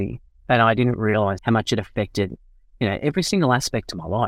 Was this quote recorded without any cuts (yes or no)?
no